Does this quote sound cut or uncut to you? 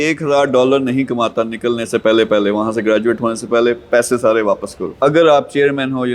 cut